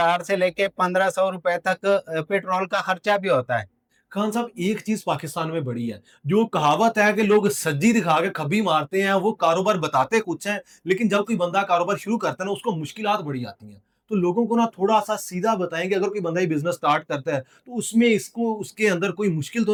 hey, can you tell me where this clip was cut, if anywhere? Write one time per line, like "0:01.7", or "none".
none